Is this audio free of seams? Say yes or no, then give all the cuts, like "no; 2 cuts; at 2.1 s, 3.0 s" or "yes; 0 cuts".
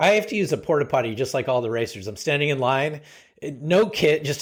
yes; 0 cuts